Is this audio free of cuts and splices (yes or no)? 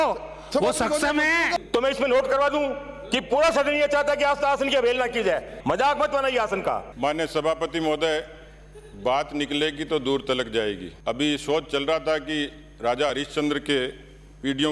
no